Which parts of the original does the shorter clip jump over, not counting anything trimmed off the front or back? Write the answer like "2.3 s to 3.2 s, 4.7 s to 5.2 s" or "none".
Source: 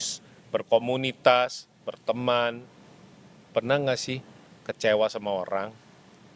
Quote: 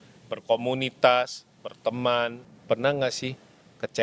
2.7 s to 3.3 s